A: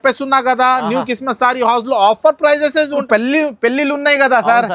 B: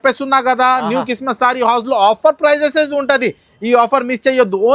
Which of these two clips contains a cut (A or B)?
A